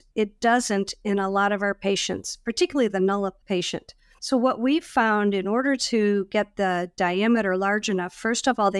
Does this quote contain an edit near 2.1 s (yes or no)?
no